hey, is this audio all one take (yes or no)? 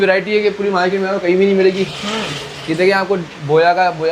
yes